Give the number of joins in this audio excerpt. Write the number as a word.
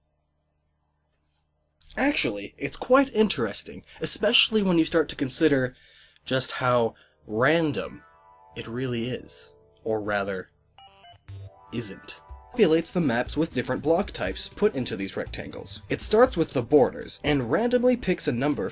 zero